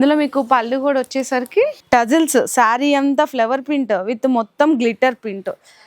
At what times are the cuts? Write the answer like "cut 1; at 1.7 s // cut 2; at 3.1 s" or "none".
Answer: cut 1; at 1.8 s